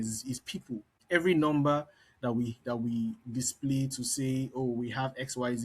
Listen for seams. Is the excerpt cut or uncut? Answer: cut